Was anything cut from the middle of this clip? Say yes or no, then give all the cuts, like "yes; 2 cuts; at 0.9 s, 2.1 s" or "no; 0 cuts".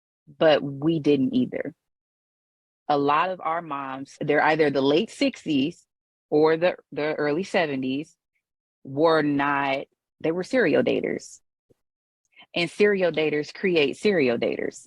yes; 1 cut; at 4.2 s